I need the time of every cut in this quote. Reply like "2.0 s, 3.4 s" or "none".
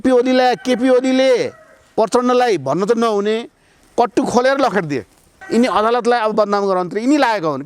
5.3 s